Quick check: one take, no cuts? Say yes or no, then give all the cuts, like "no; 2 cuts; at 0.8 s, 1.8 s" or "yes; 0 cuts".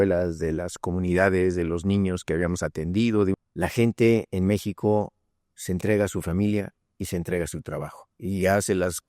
no; 1 cut; at 3.3 s